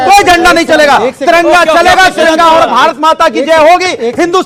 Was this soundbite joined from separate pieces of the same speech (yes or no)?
no